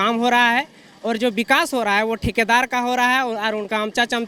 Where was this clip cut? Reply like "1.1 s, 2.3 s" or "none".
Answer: none